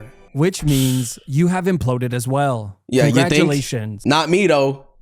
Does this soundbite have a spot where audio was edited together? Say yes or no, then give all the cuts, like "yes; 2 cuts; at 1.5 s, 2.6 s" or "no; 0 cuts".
yes; 1 cut; at 4.0 s